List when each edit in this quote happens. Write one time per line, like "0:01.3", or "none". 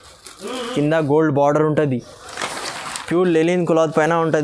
none